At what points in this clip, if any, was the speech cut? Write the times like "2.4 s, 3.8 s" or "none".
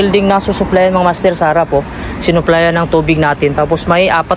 none